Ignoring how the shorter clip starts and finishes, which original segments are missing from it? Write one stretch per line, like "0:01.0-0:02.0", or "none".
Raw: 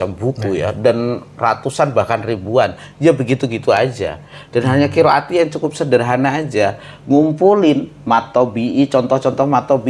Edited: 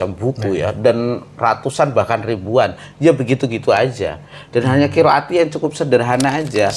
none